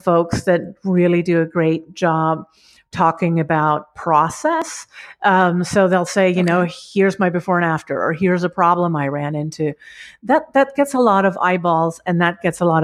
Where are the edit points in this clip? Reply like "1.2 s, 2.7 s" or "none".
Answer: none